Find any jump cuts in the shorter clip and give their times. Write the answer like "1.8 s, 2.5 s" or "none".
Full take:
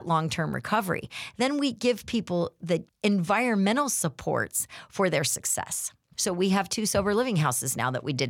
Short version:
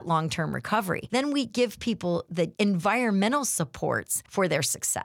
1.0 s, 2.4 s, 4.2 s